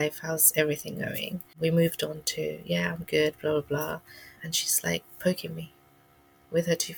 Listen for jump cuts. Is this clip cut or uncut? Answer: cut